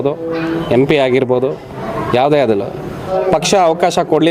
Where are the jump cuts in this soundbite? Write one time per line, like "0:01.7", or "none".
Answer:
0:03.1

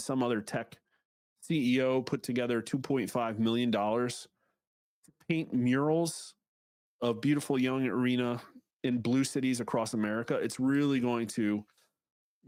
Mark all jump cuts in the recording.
none

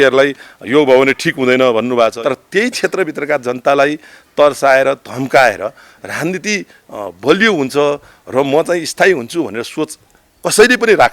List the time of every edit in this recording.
0:02.2

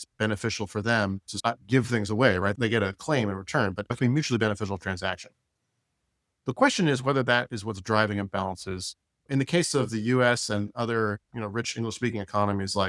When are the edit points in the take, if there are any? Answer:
0:01.3
0:02.5
0:03.9
0:09.3

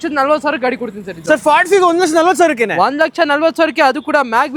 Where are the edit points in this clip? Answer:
none

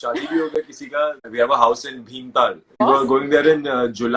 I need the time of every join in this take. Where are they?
0:01.2
0:02.8

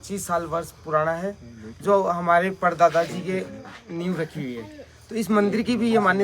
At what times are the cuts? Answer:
none

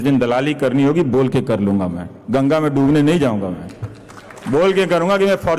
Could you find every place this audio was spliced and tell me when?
none

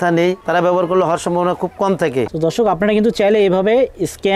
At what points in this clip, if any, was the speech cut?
0:02.3

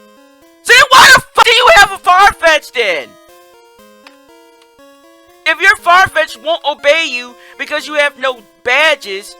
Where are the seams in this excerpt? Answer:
0:01.4

